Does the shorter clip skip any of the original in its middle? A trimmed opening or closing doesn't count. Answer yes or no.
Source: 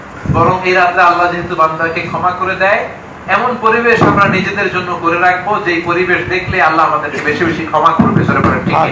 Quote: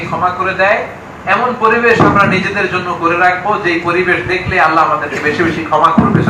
no